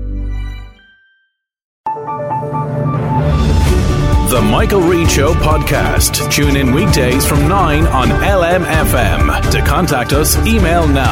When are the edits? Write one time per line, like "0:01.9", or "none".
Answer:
0:01.8